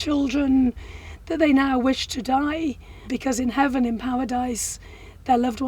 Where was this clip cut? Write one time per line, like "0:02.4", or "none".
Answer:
0:03.1